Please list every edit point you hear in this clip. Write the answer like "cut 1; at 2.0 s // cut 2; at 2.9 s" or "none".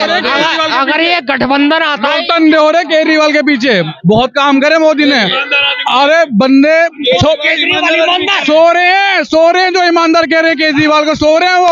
none

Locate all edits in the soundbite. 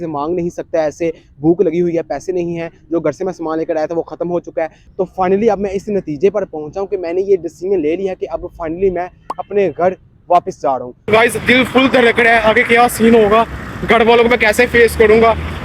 cut 1; at 4.9 s // cut 2; at 10.9 s

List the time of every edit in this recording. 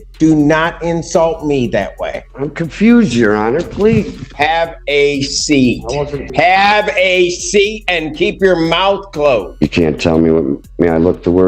cut 1; at 2.2 s // cut 2; at 4.3 s // cut 3; at 6.3 s // cut 4; at 9.5 s

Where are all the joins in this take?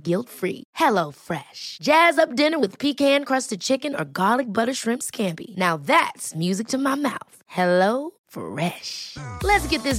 none

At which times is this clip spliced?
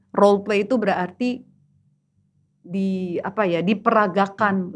none

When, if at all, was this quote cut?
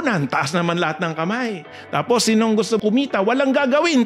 cut 1; at 2.8 s

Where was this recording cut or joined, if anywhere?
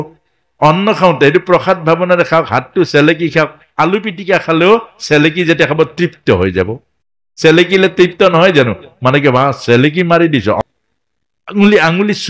cut 1; at 10.6 s

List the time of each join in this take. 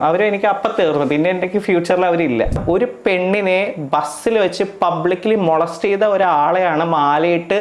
cut 1; at 2.6 s

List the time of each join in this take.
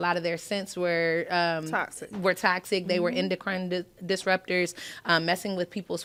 none

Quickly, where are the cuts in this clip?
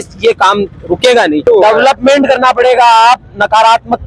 cut 1; at 1.4 s

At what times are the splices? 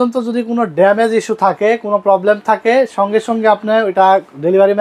none

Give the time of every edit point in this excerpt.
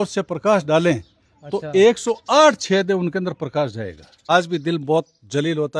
cut 1; at 4.3 s

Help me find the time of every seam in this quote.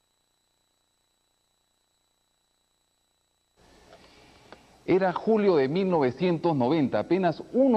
none

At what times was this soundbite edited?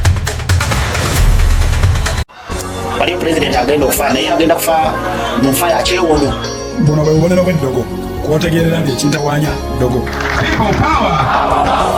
none

